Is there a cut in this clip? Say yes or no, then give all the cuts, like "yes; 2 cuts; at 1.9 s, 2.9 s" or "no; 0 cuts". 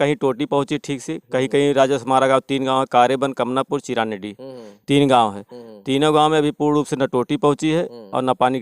no; 0 cuts